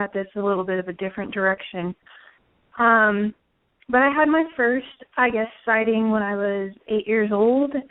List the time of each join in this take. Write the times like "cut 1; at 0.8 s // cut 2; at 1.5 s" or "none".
cut 1; at 1.7 s